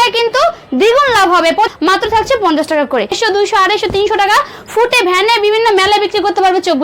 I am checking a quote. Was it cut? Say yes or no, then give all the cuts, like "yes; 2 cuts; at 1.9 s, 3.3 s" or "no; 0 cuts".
yes; 2 cuts; at 1.7 s, 3.1 s